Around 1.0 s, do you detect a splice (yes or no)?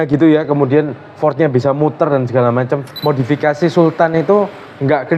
no